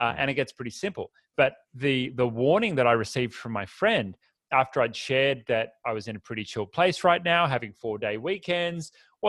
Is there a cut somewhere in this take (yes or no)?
no